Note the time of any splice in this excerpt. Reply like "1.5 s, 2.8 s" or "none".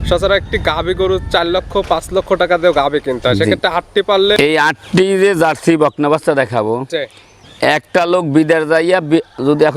4.4 s